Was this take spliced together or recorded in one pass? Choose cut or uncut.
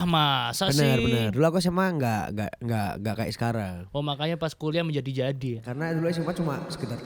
uncut